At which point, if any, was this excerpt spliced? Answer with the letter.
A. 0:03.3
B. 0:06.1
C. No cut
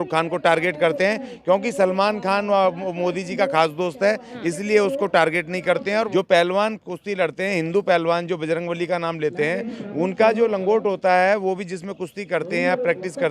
B